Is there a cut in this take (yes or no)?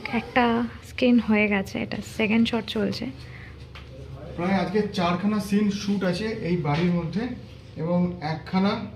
no